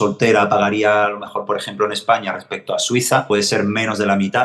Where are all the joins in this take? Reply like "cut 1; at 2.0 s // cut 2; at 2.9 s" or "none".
cut 1; at 3.2 s